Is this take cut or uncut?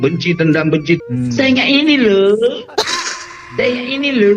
cut